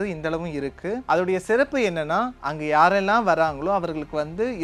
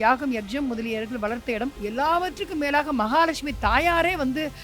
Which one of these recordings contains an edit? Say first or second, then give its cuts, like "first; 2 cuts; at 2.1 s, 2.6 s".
second; 1 cut; at 1.8 s